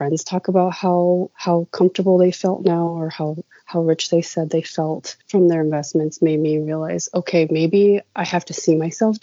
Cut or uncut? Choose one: uncut